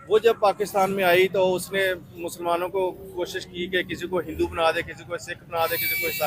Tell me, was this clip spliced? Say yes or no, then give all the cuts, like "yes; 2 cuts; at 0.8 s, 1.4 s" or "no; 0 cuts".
no; 0 cuts